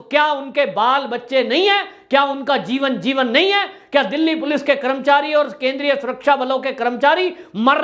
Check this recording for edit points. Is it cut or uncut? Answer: uncut